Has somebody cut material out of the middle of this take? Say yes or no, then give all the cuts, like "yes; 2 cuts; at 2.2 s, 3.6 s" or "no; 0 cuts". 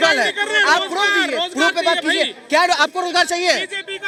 no; 0 cuts